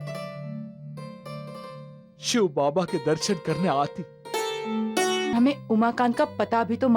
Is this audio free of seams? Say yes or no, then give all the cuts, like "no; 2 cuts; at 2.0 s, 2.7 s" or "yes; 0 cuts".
no; 1 cut; at 5.3 s